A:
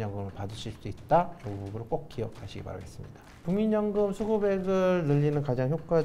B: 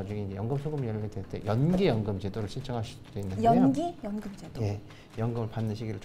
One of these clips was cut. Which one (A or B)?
A